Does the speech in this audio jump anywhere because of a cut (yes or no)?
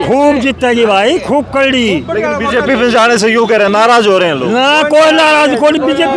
no